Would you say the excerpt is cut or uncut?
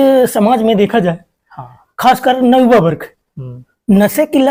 uncut